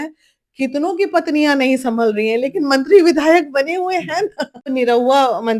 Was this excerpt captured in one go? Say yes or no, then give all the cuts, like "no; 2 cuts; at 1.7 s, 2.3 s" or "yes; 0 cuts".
no; 1 cut; at 4.6 s